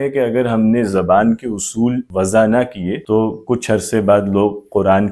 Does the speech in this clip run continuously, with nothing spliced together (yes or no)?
yes